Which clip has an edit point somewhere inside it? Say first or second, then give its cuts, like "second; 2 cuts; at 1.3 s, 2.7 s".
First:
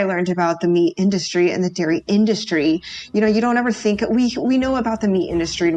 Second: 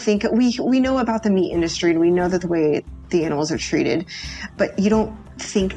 second; 1 cut; at 4.5 s